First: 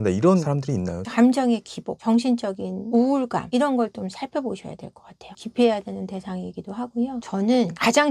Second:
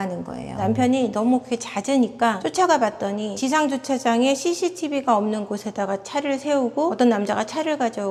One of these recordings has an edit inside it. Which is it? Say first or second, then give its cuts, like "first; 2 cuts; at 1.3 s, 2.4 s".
first; 3 cuts; at 1.0 s, 5.3 s, 7.2 s